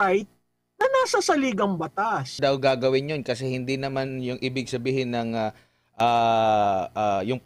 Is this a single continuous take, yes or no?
no